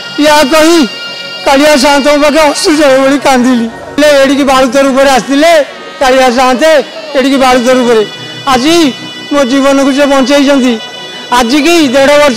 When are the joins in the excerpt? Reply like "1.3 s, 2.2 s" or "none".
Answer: 4.0 s

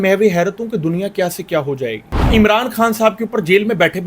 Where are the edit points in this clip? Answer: 2.1 s

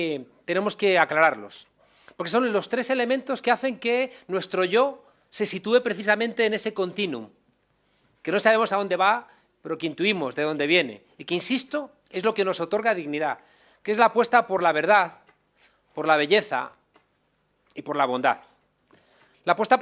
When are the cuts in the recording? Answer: none

